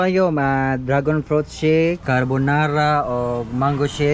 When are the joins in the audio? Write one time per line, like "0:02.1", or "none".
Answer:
0:02.0